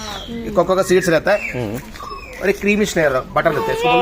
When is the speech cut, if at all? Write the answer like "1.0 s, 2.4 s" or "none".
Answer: none